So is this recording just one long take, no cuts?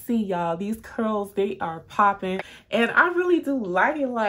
no; 1 cut; at 2.5 s

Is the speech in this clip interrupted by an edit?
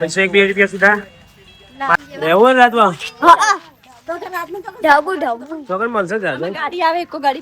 yes; 1 cut; at 1.9 s

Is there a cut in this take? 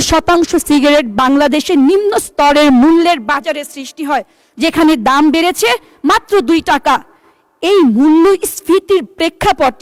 no; 0 cuts

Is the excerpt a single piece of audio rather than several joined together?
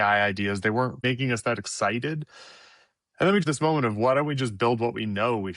no; 2 cuts; at 1.0 s, 3.4 s

